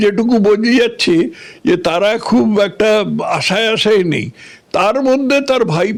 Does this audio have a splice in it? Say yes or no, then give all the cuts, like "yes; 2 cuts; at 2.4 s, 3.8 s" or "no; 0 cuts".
no; 0 cuts